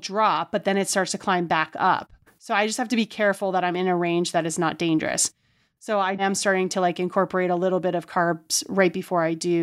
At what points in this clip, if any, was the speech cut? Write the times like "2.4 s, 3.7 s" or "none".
6.2 s